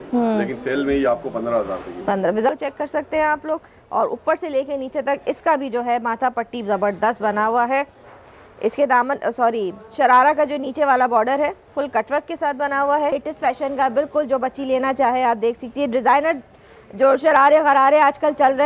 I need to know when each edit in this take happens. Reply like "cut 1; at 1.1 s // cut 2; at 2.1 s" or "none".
cut 1; at 2.5 s // cut 2; at 8.0 s // cut 3; at 13.1 s